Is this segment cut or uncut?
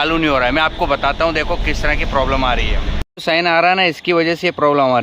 cut